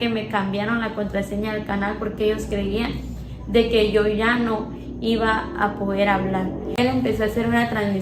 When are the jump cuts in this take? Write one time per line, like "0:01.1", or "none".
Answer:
0:06.7